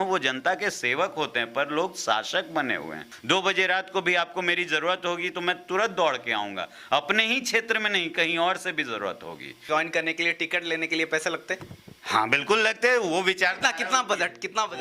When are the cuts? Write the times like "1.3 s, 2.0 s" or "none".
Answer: 3.1 s, 9.6 s